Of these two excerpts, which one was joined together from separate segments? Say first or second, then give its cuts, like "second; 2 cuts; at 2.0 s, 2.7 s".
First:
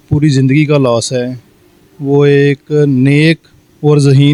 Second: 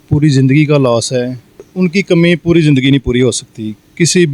second; 1 cut; at 1.7 s